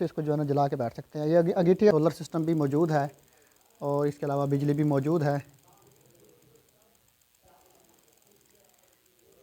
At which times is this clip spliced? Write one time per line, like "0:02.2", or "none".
0:01.9